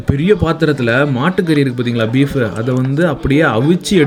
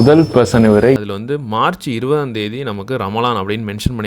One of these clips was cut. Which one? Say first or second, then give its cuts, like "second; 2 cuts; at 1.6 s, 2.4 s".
second; 1 cut; at 1.0 s